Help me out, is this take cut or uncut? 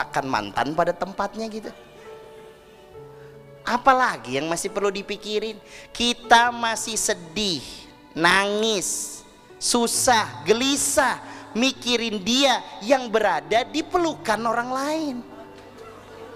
uncut